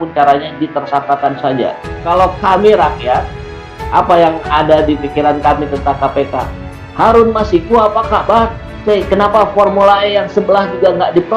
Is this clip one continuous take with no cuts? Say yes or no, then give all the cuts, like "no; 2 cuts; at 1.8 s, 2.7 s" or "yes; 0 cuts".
no; 2 cuts; at 1.9 s, 8.7 s